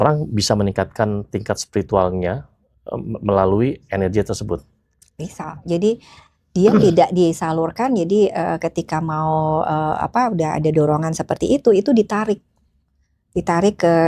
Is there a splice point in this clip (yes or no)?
no